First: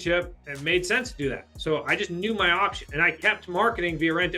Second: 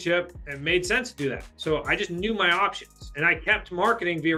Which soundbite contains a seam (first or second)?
first